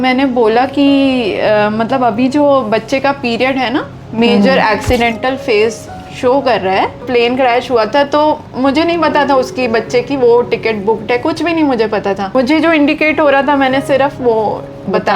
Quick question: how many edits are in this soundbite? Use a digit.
2